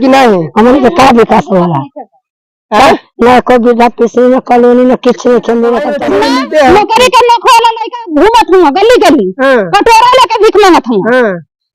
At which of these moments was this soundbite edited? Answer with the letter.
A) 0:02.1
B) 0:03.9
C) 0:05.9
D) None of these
C